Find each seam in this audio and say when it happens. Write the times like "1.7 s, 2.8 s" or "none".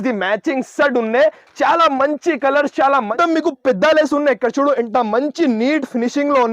3.1 s